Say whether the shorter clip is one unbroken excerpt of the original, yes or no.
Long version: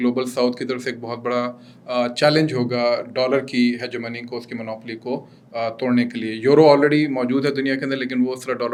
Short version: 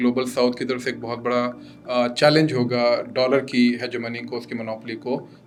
yes